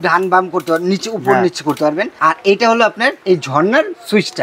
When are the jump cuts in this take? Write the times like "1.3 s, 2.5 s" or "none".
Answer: 2.1 s, 3.2 s